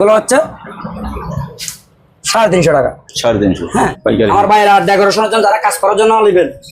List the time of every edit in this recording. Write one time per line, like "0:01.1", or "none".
0:03.9